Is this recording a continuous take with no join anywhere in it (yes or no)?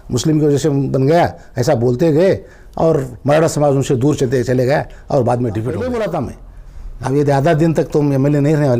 no